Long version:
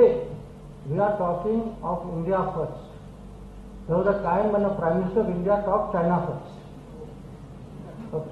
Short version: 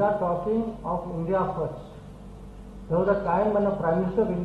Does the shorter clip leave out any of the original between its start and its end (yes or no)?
no